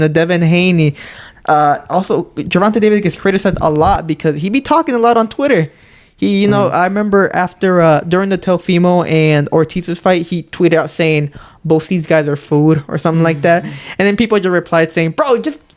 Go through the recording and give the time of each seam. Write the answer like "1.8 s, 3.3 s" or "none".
none